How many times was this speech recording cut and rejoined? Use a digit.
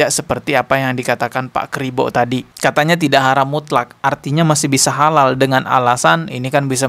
0